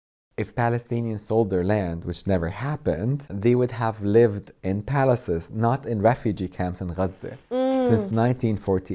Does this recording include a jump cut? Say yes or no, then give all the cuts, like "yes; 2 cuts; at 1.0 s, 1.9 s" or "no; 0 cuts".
no; 0 cuts